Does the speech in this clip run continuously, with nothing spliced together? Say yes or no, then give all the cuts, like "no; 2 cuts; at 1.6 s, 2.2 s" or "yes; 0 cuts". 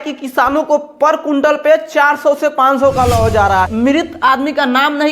no; 1 cut; at 3.7 s